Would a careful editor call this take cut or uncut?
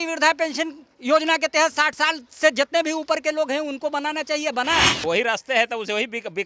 cut